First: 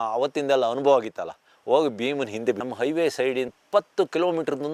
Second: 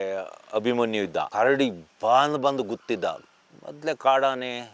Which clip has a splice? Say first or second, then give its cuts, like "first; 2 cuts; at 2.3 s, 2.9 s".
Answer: first; 2 cuts; at 2.6 s, 3.5 s